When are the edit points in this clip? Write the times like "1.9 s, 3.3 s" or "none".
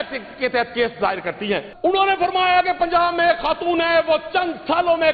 1.7 s